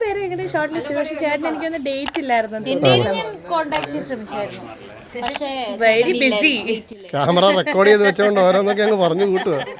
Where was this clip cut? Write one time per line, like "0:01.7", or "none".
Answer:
none